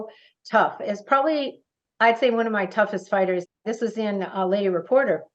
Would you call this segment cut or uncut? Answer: cut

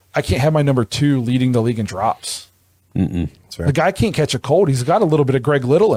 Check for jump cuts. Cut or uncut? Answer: uncut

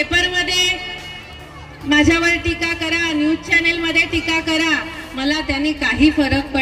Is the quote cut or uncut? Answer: uncut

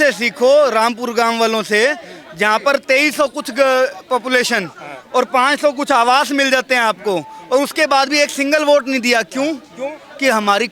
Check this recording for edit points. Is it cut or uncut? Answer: uncut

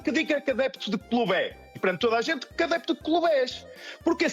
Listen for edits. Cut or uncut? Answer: cut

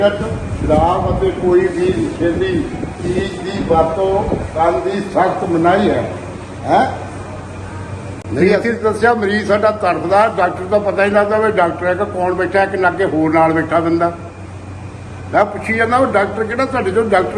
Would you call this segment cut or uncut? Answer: cut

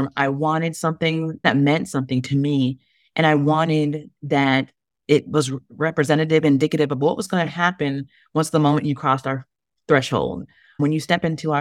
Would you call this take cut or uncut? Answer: cut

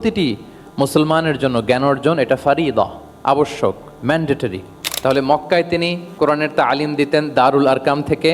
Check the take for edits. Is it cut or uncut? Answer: cut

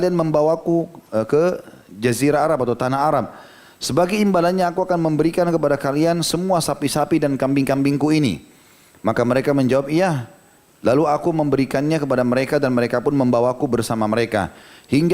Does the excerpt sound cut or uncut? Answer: cut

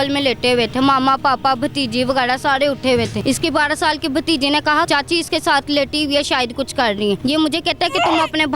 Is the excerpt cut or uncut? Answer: cut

